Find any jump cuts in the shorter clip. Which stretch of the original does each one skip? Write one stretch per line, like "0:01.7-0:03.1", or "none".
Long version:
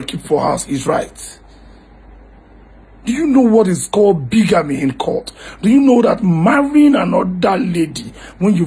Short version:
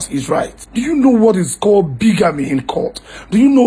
0:01.5-0:03.3